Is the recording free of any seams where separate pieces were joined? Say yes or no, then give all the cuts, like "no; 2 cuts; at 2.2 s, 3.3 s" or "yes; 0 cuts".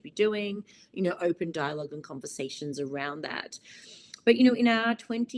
yes; 0 cuts